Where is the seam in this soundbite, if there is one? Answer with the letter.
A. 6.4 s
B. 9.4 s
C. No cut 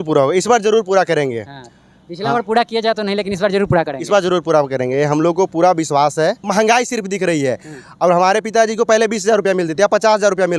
A